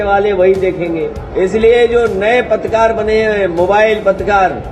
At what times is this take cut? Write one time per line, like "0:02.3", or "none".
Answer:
0:01.2